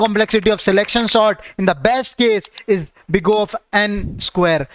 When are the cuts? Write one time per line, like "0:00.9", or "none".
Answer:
none